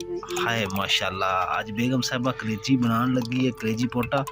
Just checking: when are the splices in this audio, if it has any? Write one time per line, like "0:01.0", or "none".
none